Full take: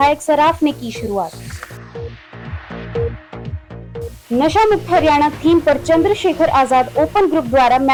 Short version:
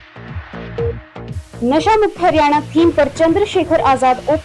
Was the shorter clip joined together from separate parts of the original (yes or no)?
yes